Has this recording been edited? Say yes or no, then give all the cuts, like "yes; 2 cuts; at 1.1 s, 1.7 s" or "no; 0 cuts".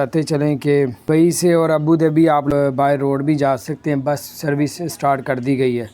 yes; 2 cuts; at 1.0 s, 2.5 s